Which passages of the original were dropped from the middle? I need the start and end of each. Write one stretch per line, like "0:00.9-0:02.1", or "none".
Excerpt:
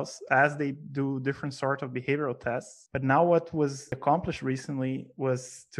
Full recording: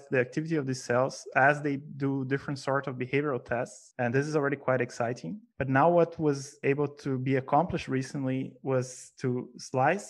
0:03.8-0:05.4
0:06.6-0:07.4